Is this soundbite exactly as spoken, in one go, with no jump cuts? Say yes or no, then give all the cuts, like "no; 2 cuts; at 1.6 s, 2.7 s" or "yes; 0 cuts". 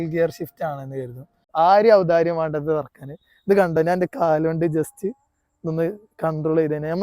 no; 1 cut; at 1.5 s